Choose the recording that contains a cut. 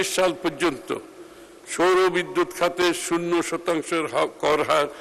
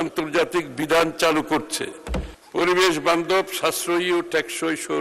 second; 1 cut; at 2.3 s

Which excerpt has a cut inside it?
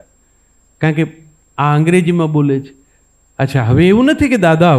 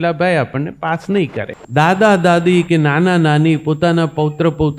second; 1 cut; at 1.6 s

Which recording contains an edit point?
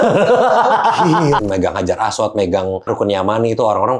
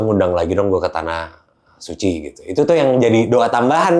first; 2 cuts; at 1.4 s, 2.9 s

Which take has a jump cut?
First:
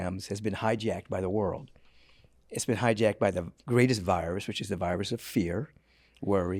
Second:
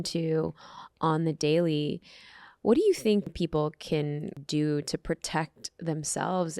second; 2 cuts; at 3.3 s, 4.4 s

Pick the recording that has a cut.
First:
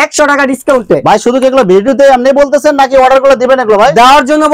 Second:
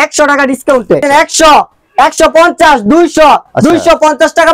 second; 1 cut; at 1.0 s

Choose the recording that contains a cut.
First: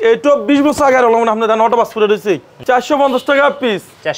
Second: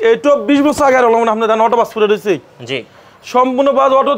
first; 1 cut; at 2.5 s

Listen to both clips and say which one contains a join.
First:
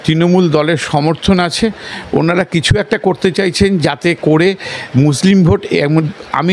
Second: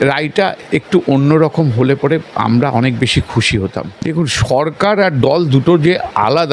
second; 1 cut; at 3.9 s

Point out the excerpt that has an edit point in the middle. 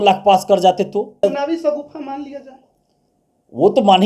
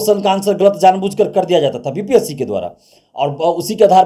first; 1 cut; at 1.2 s

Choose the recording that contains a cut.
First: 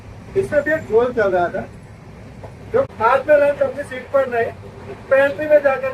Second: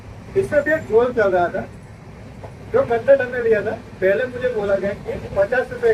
first; 1 cut; at 2.9 s

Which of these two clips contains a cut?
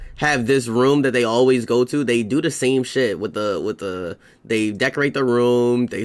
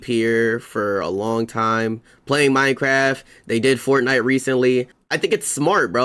second; 1 cut; at 5.0 s

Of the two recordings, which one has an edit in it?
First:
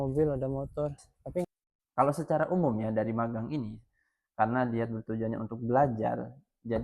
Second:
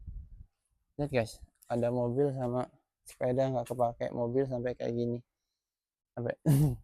first; 1 cut; at 1.4 s

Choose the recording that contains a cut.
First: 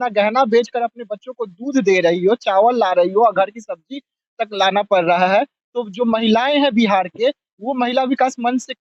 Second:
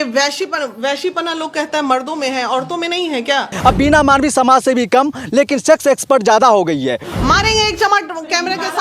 second; 2 cuts; at 3.5 s, 7.0 s

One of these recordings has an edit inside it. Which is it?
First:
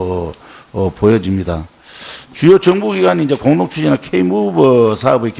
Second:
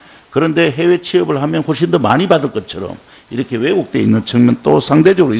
first; 1 cut; at 2.5 s

